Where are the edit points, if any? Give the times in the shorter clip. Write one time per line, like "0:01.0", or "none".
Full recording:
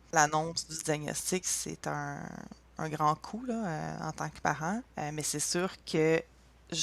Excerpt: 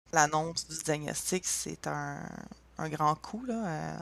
none